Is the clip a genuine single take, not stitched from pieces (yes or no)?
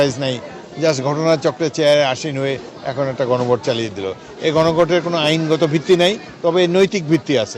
yes